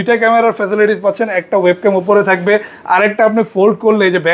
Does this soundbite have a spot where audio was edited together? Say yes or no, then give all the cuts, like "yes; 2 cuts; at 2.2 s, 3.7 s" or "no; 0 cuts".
no; 0 cuts